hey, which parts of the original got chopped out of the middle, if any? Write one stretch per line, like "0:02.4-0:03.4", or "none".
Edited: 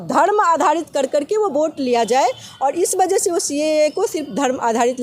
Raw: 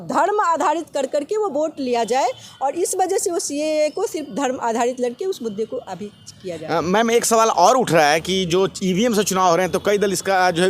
none